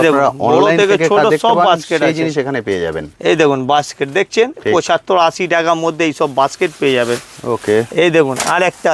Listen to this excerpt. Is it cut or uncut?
uncut